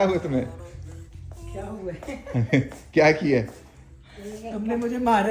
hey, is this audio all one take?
yes; 0 cuts

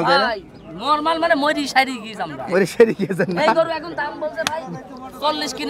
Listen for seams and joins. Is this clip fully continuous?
yes; 0 cuts

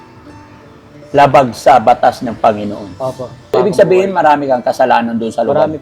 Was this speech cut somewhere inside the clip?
yes; 1 cut; at 3.5 s

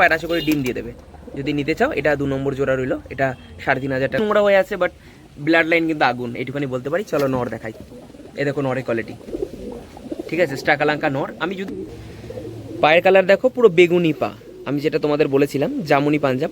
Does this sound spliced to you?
yes; 2 cuts; at 4.2 s, 11.6 s

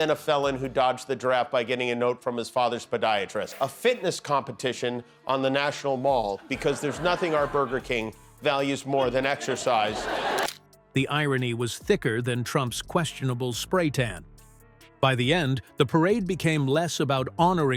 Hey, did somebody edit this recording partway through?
no; 0 cuts

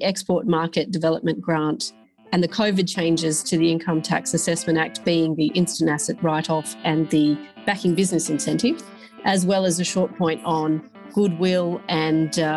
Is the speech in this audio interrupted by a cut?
no; 0 cuts

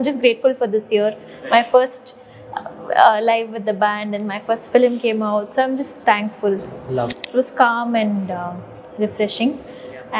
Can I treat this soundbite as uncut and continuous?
no; 1 cut; at 7.2 s

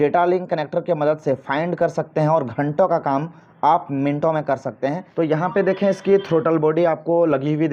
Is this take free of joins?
no; 1 cut; at 5.0 s

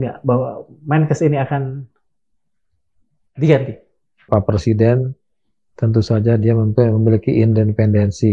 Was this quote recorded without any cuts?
no; 1 cut; at 4.2 s

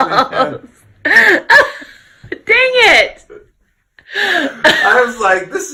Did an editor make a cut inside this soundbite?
no; 0 cuts

